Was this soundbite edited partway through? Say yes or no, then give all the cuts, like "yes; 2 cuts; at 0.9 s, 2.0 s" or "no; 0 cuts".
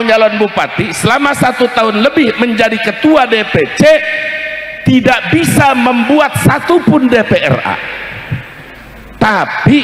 no; 0 cuts